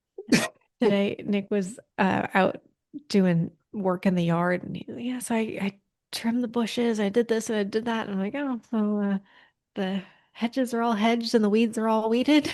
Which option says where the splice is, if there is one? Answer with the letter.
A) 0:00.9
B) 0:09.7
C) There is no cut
A